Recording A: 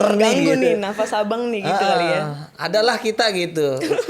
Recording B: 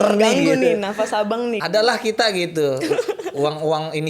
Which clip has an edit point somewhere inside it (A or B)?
B